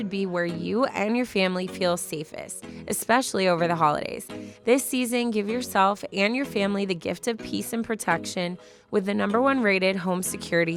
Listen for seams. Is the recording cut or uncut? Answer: uncut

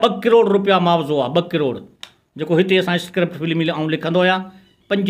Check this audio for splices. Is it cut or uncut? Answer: uncut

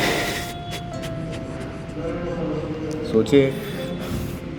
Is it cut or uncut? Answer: uncut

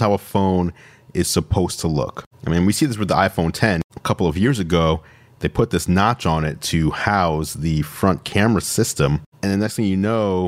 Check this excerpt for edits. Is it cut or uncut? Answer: cut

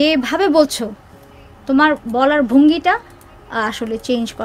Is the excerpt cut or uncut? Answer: uncut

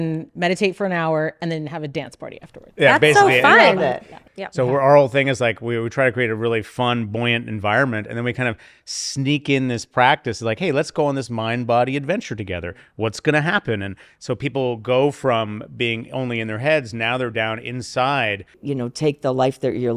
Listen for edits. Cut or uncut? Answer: cut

